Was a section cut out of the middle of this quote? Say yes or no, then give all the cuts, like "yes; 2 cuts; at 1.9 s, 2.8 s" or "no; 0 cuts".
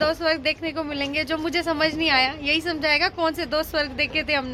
no; 0 cuts